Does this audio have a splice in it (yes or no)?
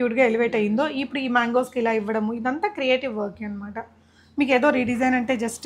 no